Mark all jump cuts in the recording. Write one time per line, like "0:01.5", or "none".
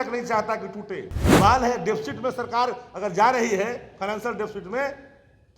0:01.2

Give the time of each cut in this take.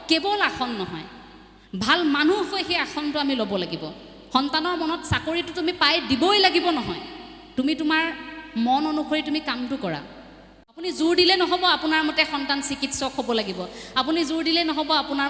0:10.9

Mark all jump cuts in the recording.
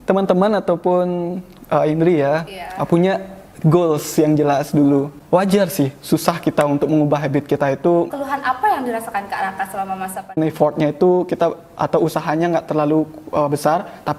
0:05.2
0:08.1
0:10.4

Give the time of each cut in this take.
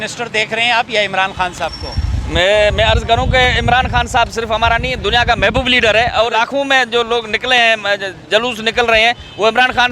0:06.3

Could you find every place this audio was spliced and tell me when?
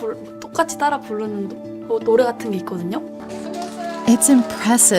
0:03.2

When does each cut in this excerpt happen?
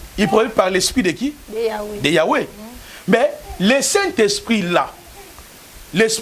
none

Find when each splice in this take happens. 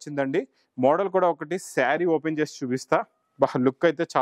none

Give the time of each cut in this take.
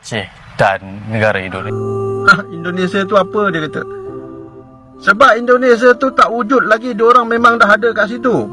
0:01.6

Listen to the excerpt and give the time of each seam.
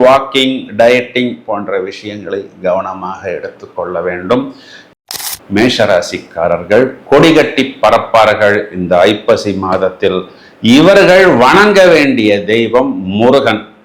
0:05.0

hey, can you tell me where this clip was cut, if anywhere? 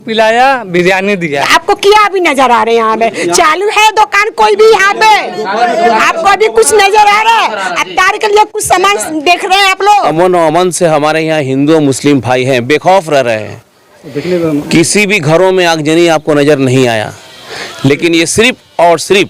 0:01.4
0:09.9

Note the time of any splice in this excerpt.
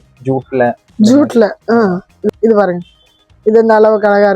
0:02.2

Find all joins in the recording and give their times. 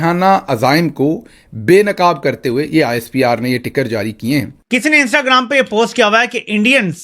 0:04.6

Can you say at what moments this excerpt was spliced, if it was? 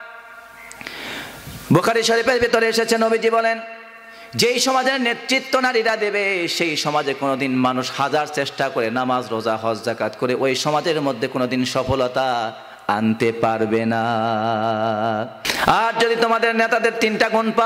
0:15.4

